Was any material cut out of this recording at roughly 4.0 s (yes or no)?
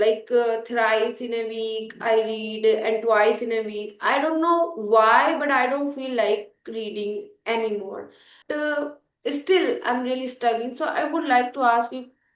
no